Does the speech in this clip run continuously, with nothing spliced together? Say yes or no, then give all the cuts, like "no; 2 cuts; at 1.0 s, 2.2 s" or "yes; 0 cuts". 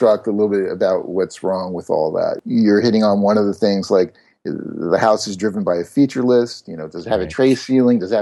no; 1 cut; at 2.4 s